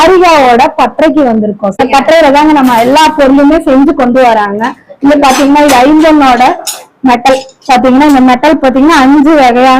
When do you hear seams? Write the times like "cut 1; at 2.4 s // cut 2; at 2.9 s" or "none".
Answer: cut 1; at 1.8 s